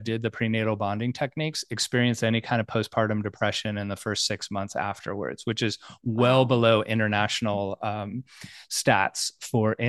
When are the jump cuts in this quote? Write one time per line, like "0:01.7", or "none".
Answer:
none